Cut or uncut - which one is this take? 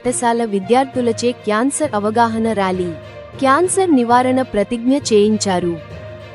uncut